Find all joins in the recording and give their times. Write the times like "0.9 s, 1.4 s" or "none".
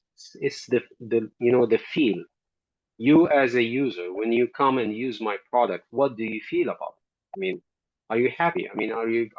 none